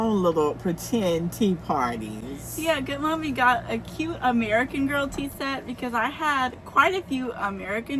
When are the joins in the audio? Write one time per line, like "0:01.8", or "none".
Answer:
none